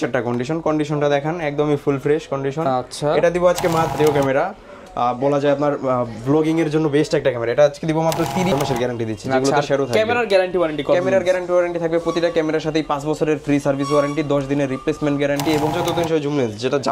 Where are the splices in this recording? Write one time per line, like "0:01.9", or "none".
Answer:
0:04.0
0:08.5
0:15.7